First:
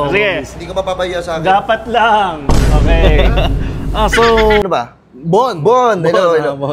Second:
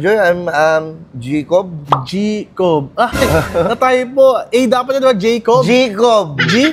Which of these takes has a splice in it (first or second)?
first